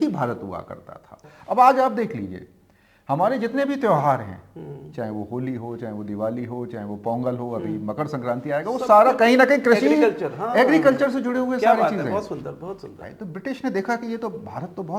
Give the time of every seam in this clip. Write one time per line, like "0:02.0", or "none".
0:01.3
0:13.0